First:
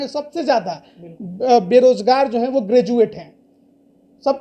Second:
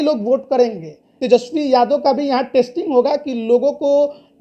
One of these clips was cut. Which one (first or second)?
second